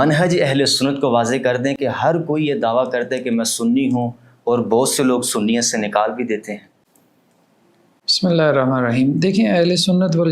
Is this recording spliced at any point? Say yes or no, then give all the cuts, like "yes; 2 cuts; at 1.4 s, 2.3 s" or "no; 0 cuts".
no; 0 cuts